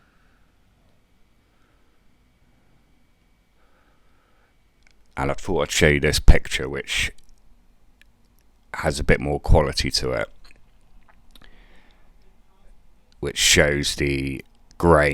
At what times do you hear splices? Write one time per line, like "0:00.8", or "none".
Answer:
0:05.0